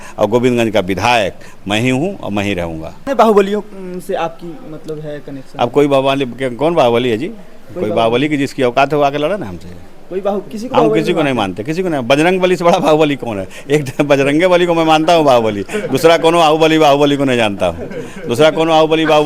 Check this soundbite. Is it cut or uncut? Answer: uncut